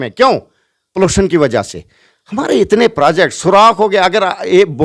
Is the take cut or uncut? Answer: uncut